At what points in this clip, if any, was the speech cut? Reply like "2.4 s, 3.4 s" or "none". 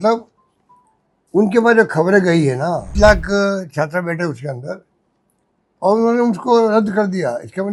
2.9 s